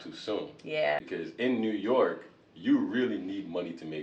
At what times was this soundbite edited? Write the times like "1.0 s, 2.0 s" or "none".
1.1 s